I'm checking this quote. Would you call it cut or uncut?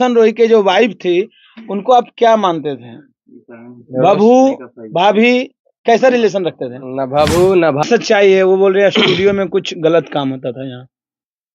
cut